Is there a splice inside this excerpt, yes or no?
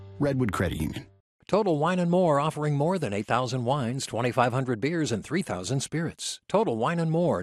yes